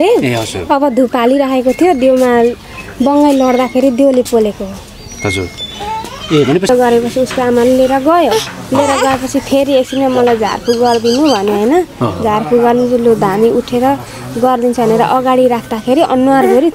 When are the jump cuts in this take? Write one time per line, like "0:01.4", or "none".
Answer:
0:06.7